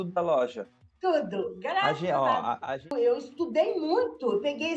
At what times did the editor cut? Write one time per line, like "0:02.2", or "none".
0:02.9